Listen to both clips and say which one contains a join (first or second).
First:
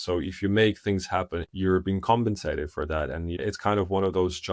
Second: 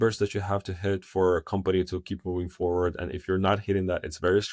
first